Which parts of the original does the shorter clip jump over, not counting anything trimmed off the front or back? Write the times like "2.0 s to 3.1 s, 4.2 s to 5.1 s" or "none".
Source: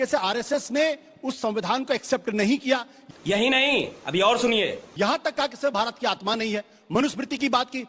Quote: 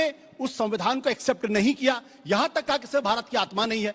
3.0 s to 4.8 s